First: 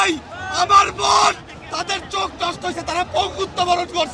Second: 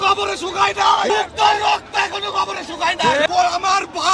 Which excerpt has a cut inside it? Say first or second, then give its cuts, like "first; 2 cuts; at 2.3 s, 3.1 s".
second; 2 cuts; at 1.1 s, 3.2 s